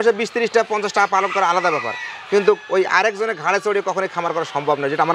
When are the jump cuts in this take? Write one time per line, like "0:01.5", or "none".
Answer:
none